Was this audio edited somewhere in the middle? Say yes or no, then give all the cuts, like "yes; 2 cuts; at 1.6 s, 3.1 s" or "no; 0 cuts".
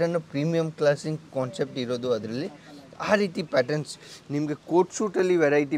no; 0 cuts